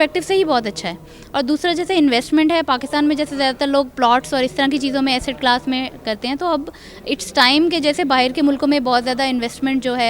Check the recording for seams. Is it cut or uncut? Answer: uncut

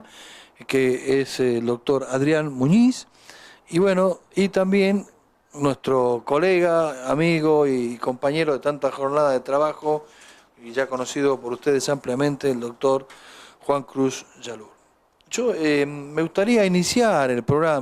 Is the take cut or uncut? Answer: cut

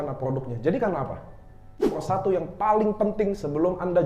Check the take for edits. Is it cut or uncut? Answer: cut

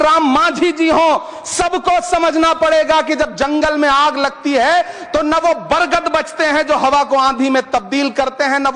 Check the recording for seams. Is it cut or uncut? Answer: uncut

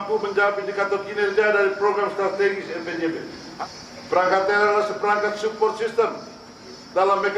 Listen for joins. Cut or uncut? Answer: cut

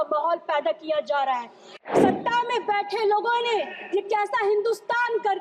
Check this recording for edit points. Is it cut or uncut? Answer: cut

